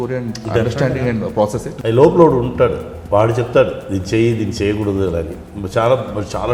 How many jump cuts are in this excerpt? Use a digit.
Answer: 1